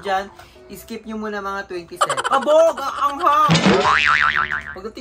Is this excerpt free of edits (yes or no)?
no